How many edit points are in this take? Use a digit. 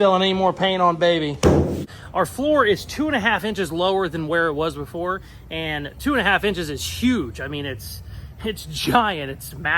1